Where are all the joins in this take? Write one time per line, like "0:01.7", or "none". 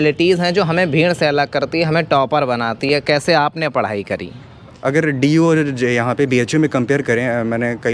0:04.8

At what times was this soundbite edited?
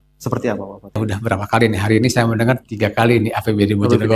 0:01.0

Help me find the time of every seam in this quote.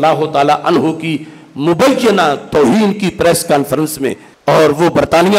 0:04.3

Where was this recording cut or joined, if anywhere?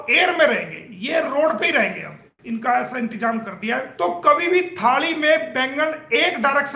0:03.9

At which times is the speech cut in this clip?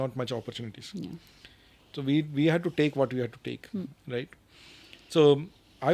none

